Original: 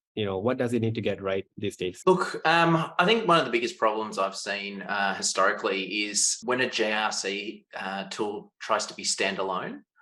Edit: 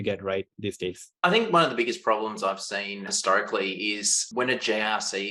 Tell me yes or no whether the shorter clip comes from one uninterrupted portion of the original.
no